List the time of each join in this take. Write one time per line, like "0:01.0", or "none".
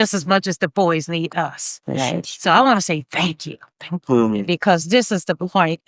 none